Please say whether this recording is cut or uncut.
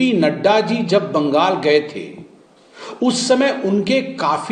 uncut